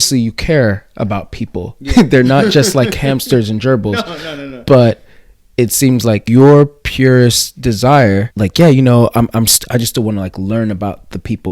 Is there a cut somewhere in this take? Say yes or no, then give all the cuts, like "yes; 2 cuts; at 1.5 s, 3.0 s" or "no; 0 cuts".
yes; 2 cuts; at 6.2 s, 8.3 s